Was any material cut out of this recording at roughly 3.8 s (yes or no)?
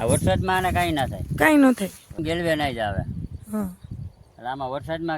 no